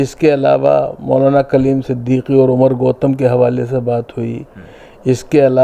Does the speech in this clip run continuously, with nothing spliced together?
yes; 0 cuts

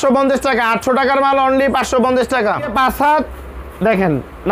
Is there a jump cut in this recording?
yes; 1 cut; at 2.7 s

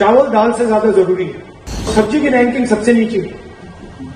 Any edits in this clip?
yes; 1 cut; at 1.9 s

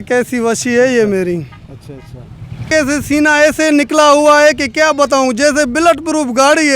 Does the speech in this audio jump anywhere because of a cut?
yes; 1 cut; at 2.7 s

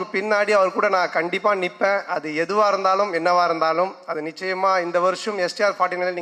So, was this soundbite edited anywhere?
no; 0 cuts

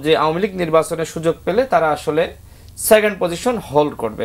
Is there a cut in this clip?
no; 0 cuts

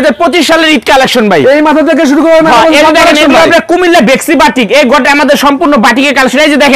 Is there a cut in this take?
no; 0 cuts

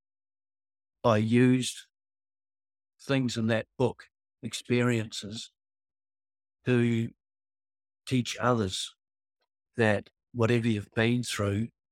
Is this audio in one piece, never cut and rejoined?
yes; 0 cuts

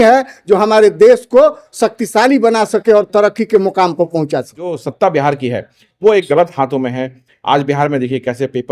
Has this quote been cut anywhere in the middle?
yes; 1 cut; at 4.8 s

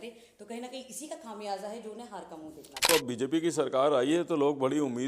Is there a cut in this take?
yes; 1 cut; at 2.8 s

